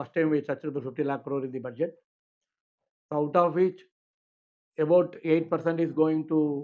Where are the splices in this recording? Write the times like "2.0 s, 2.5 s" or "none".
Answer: none